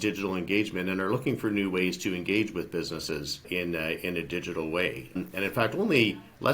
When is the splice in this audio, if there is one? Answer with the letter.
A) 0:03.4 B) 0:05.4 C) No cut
A